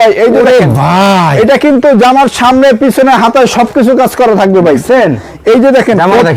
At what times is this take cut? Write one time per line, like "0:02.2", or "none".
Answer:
none